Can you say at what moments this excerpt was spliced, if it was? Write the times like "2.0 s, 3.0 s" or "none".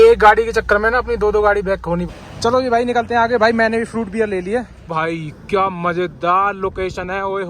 2.1 s, 4.8 s

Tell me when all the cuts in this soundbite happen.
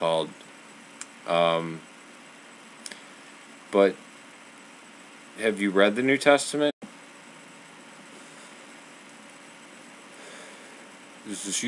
none

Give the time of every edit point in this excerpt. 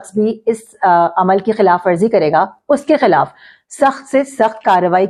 none

